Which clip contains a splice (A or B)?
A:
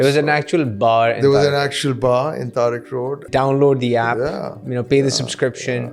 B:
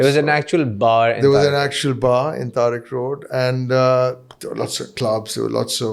A